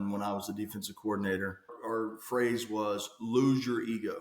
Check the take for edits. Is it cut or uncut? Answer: cut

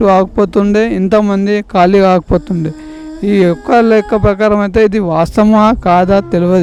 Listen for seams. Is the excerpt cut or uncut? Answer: uncut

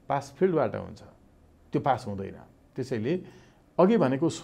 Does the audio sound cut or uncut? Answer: uncut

